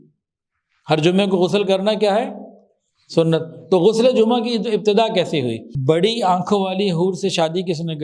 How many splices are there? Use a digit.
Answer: 1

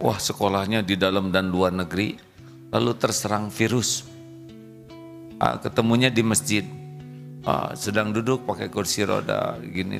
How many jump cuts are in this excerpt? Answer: 0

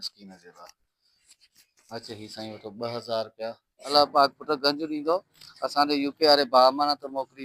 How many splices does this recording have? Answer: 1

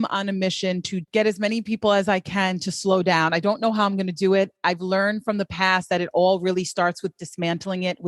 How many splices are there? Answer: 2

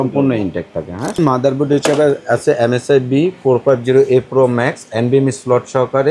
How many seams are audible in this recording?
1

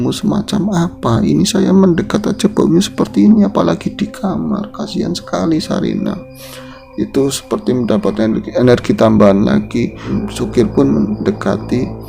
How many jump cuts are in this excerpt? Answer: 1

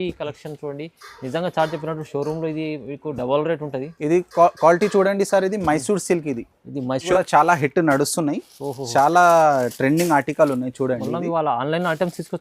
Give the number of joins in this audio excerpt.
1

